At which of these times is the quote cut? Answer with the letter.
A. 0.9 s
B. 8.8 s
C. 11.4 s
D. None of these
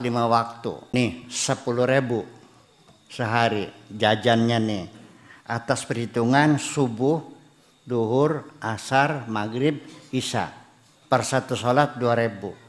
A